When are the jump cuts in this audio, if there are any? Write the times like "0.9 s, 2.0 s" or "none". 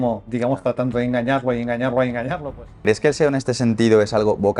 2.7 s